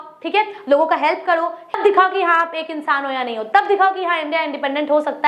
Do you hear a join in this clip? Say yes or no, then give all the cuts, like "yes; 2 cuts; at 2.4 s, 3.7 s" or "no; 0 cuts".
yes; 1 cut; at 1.8 s